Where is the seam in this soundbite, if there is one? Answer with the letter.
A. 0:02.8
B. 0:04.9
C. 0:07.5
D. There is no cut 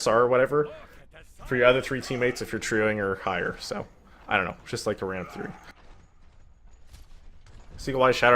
A